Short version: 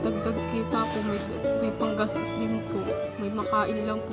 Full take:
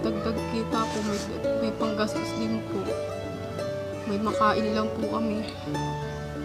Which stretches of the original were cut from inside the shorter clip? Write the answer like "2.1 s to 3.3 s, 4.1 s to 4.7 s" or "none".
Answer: 3.1 s to 3.9 s